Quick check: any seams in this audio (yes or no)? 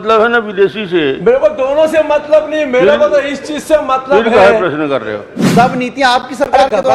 yes